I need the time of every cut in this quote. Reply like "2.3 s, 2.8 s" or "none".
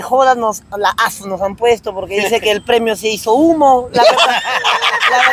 none